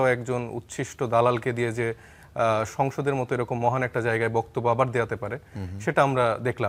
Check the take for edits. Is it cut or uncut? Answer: uncut